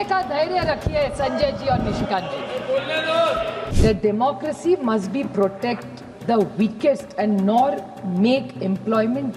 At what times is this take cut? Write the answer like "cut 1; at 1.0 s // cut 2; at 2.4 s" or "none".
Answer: cut 1; at 3.6 s